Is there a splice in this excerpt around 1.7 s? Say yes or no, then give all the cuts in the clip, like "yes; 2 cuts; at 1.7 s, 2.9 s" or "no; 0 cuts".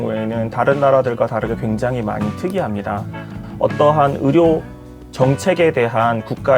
no; 1 cut; at 3.4 s